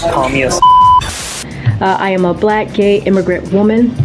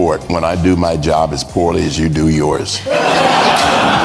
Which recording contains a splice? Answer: first; 1 cut; at 1.2 s

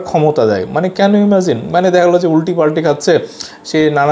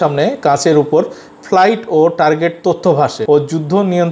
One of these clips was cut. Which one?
second; 1 cut; at 3.2 s

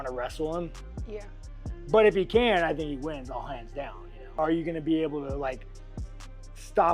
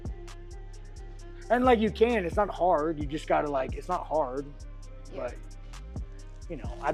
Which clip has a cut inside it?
first; 1 cut; at 4.2 s

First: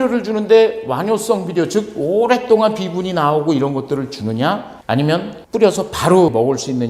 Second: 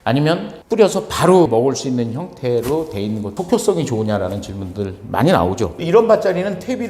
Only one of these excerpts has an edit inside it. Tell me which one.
second; 2 cuts; at 3.3 s, 5.8 s

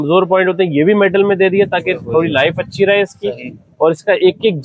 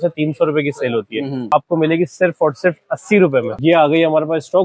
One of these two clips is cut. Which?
second; 2 cuts; at 1.5 s, 3.5 s

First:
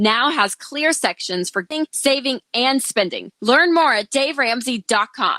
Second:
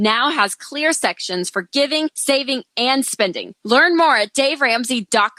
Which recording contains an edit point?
first; 1 cut; at 1.7 s

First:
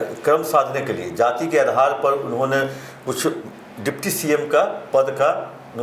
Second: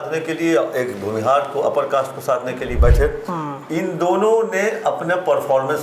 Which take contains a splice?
second; 1 cut; at 2.7 s

